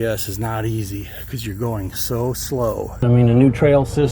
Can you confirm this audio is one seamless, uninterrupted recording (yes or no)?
no